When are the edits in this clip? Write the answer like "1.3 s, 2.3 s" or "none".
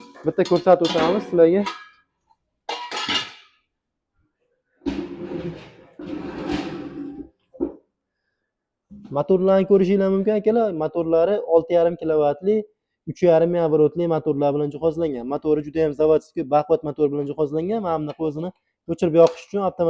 none